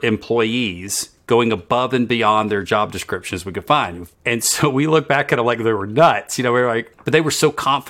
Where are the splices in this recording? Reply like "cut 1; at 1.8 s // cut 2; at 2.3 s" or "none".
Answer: cut 1; at 4.1 s // cut 2; at 6.9 s